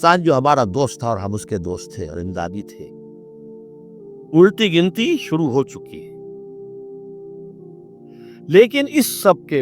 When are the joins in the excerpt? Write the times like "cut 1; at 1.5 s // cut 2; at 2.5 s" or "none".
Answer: cut 1; at 6.3 s // cut 2; at 8.4 s